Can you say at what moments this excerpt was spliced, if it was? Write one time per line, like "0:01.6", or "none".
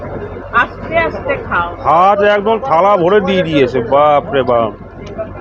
0:01.8